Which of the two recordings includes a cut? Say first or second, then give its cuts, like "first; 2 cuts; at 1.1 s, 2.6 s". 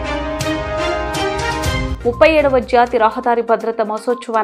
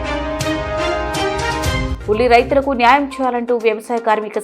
second; 1 cut; at 1.9 s